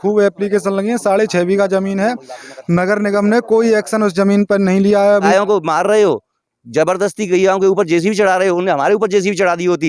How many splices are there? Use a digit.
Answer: 1